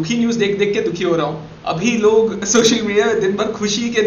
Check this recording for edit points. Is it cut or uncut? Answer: uncut